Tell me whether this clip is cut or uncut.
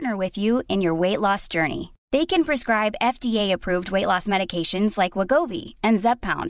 uncut